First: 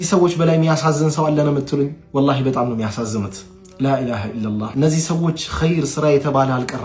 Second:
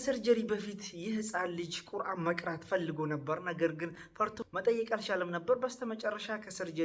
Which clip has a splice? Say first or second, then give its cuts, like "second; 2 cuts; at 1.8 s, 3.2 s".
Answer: second; 1 cut; at 4.4 s